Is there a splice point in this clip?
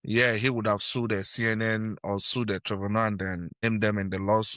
yes; 1 cut; at 3.5 s

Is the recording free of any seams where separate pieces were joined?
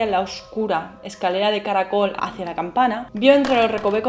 no; 1 cut; at 2.2 s

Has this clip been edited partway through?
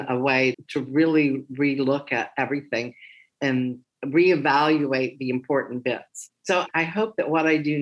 yes; 1 cut; at 6.2 s

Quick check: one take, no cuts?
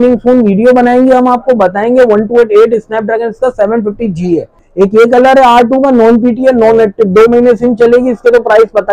no; 1 cut; at 4.6 s

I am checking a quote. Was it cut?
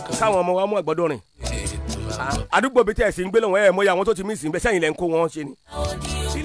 no; 0 cuts

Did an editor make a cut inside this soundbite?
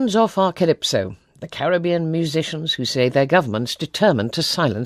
no; 0 cuts

